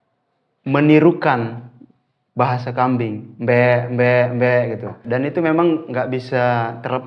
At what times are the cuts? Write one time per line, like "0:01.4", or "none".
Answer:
0:05.0